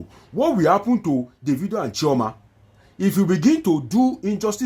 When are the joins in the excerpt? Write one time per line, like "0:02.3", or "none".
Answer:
none